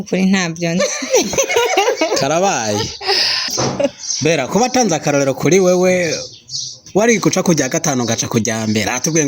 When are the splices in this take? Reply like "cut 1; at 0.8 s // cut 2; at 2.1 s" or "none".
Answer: cut 1; at 3.6 s